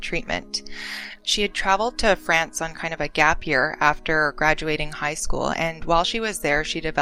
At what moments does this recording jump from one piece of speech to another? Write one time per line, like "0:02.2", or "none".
0:01.2